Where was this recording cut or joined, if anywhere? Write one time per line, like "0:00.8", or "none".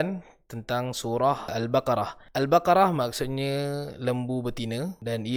none